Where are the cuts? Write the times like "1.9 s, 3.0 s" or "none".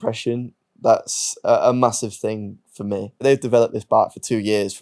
3.1 s